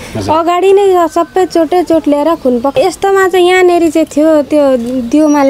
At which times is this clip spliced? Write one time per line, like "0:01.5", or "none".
0:02.7